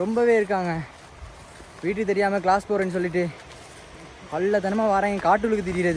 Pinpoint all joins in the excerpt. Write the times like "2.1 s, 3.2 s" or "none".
none